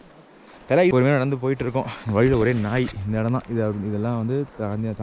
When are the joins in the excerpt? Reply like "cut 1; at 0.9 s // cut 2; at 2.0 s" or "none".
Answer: cut 1; at 0.9 s